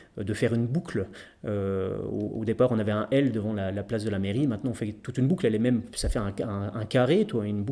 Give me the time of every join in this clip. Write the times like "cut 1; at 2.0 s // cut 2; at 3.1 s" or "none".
cut 1; at 6.0 s

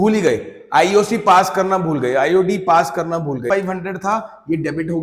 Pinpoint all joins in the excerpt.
cut 1; at 3.4 s

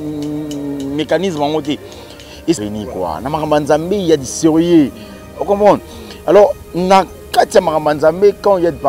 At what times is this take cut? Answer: cut 1; at 2.6 s

